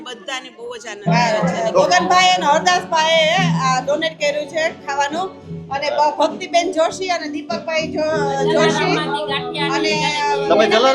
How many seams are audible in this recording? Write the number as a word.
one